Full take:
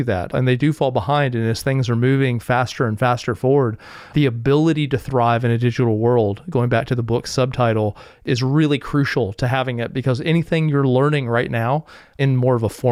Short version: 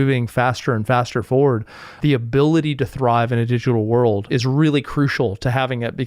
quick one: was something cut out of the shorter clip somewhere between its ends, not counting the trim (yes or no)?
yes